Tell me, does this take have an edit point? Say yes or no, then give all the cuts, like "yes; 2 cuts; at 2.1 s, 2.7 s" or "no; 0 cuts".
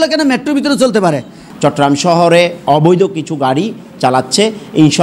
yes; 1 cut; at 1.4 s